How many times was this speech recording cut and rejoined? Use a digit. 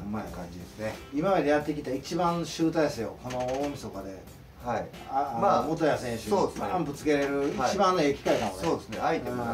0